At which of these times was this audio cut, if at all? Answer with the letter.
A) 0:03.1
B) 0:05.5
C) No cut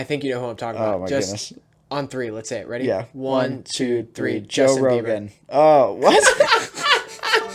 C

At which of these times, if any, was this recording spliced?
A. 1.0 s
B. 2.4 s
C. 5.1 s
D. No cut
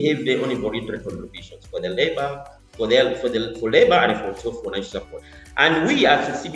C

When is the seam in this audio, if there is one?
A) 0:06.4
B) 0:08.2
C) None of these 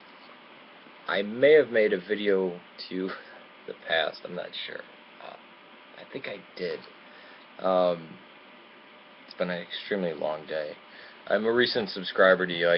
C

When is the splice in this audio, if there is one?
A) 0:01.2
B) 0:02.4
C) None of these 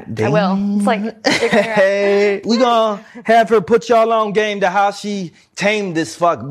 B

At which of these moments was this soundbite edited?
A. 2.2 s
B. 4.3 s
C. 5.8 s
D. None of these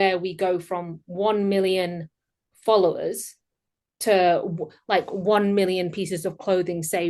D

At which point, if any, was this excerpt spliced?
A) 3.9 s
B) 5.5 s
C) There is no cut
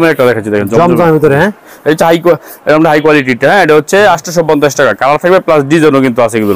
C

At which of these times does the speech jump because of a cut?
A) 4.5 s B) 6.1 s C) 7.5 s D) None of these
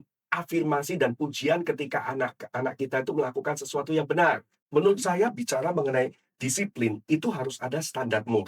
A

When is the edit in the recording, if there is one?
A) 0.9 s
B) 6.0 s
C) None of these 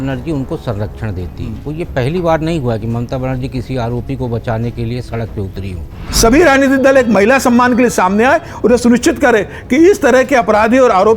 B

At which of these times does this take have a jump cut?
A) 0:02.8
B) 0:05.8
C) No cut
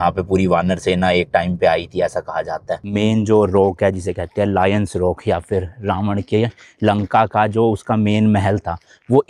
A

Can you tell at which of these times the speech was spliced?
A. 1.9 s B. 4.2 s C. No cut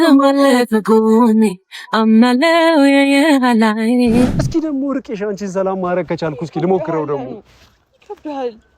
B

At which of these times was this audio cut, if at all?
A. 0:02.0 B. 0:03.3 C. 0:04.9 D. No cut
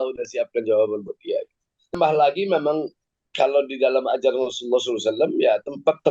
A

